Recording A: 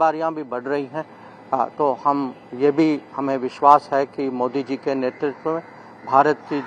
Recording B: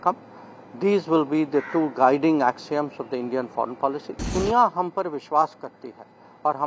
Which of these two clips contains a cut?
B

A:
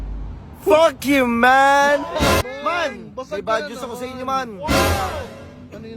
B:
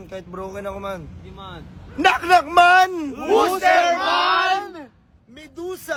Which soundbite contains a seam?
A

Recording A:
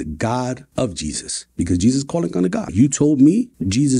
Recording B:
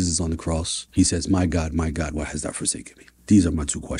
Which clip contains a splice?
A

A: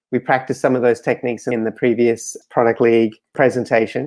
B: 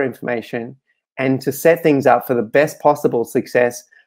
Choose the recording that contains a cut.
A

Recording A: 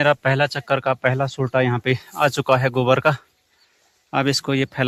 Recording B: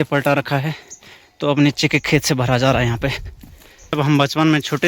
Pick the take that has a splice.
B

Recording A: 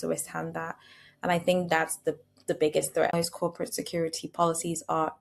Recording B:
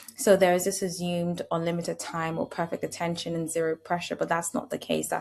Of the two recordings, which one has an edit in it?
A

